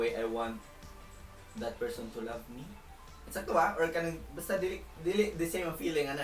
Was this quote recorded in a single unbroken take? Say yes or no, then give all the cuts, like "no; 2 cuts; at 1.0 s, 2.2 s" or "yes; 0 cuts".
yes; 0 cuts